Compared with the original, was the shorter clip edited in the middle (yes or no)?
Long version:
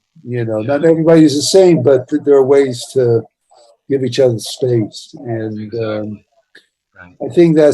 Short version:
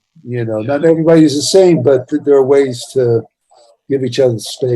no